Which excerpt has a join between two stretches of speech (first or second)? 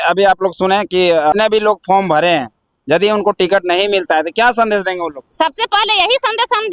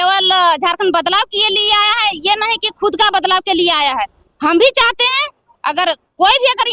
first